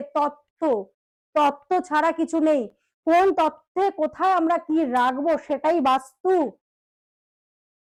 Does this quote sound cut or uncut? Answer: uncut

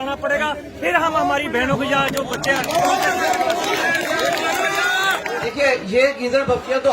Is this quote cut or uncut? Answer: cut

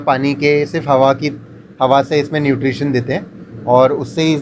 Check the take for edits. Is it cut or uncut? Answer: uncut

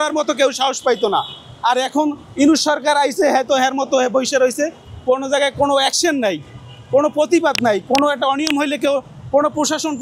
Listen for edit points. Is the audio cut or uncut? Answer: uncut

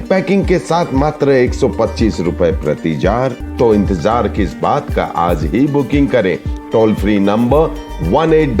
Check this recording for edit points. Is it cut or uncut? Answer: cut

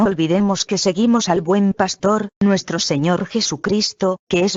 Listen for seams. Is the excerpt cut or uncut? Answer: uncut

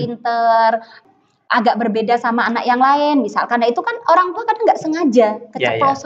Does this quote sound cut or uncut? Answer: cut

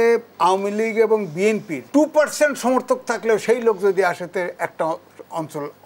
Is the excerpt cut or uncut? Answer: cut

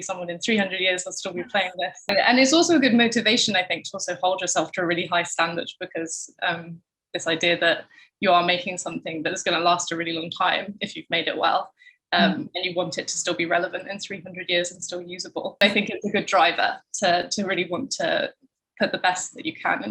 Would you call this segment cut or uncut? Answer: cut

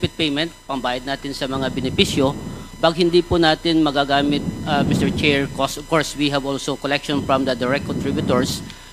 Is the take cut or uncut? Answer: uncut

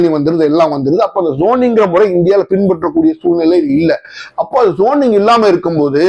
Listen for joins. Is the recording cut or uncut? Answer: uncut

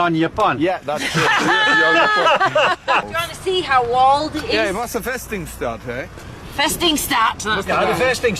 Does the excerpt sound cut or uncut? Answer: cut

